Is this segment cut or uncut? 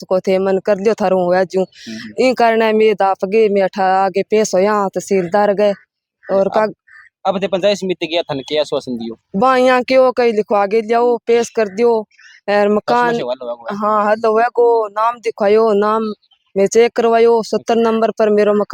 uncut